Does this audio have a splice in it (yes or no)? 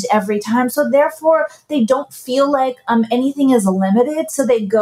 no